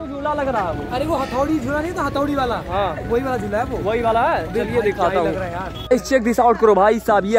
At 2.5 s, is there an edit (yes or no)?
no